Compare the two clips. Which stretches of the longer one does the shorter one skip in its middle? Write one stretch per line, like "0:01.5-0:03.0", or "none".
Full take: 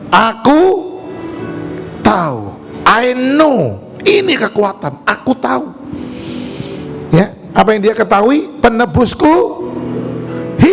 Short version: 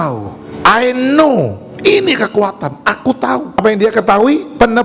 0:05.8-0:07.6